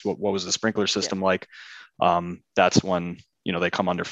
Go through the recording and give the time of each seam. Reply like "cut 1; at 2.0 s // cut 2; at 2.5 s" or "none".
none